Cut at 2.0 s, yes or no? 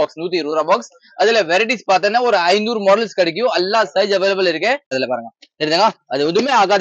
no